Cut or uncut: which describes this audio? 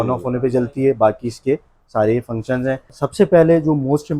cut